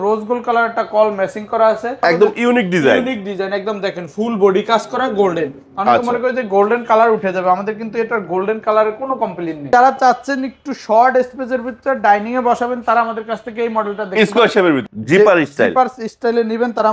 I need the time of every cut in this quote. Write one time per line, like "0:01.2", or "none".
0:02.0
0:09.7
0:14.8

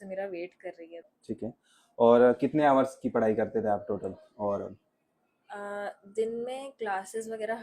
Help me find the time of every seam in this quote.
0:01.1

